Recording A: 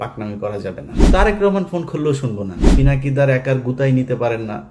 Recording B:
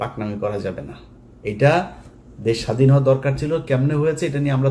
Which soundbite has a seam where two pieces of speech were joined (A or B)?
A